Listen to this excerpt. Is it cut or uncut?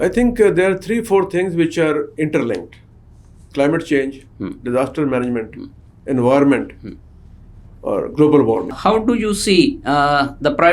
cut